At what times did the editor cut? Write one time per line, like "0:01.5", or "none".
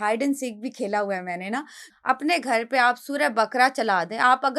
0:01.8

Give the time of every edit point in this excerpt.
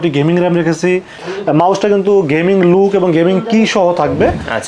0:01.2

